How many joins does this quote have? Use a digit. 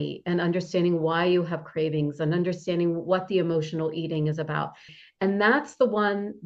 1